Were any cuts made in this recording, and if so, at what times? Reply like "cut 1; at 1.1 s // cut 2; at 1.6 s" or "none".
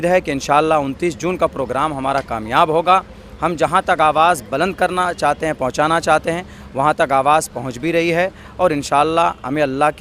none